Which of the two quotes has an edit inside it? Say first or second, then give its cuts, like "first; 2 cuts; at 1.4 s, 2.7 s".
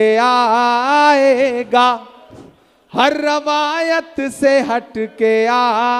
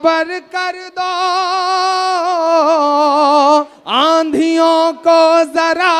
second; 1 cut; at 3.8 s